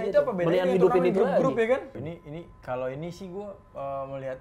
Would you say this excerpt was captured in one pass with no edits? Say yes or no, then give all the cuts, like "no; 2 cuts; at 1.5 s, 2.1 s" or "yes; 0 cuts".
no; 1 cut; at 2.0 s